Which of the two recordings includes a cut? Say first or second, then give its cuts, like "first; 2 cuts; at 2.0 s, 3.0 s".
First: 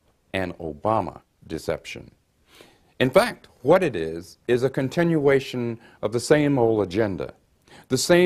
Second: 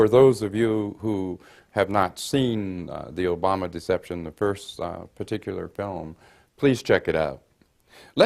second; 1 cut; at 5.2 s